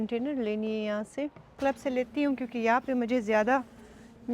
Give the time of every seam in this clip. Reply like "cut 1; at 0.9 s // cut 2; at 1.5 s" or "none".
cut 1; at 1.5 s